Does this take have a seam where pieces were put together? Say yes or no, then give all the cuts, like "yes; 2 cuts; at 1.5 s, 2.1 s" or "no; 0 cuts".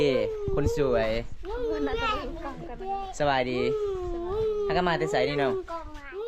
no; 0 cuts